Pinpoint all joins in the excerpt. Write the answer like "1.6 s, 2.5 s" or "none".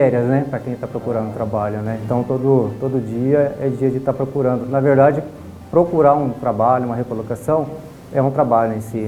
none